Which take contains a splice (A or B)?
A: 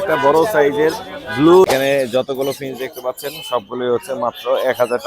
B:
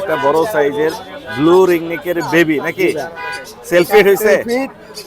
A